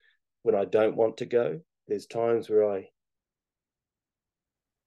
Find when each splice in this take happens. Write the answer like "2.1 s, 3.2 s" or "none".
1.9 s